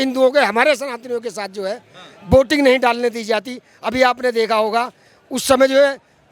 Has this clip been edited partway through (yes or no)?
no